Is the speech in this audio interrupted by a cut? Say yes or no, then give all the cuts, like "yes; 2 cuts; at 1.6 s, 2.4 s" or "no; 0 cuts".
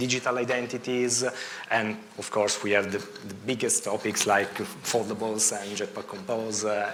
no; 0 cuts